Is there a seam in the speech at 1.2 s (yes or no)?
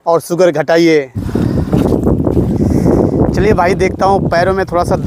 yes